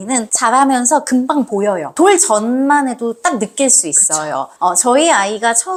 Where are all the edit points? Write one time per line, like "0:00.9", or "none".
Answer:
none